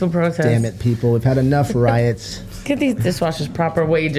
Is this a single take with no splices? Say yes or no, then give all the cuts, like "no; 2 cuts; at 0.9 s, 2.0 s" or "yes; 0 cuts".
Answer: no; 1 cut; at 2.6 s